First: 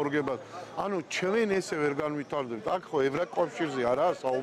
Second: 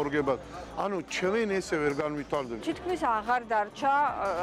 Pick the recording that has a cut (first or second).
second